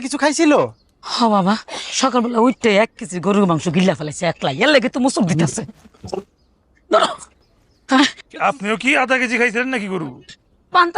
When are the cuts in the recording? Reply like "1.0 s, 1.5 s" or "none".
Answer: 5.4 s